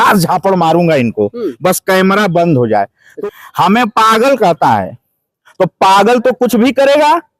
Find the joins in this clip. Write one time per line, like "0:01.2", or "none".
0:03.0